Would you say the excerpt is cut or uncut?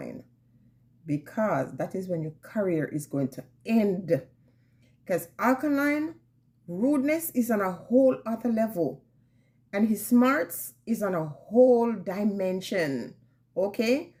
uncut